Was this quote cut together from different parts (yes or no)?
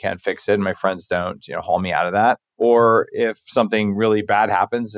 yes